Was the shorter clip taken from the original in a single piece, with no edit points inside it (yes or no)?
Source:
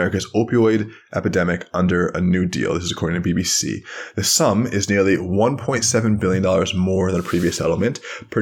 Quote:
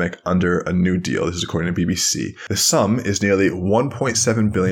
no